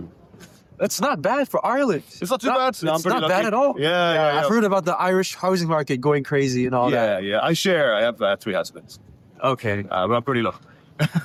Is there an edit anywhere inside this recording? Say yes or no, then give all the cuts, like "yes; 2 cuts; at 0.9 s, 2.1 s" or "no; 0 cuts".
no; 0 cuts